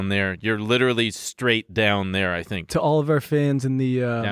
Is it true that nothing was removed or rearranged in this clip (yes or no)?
yes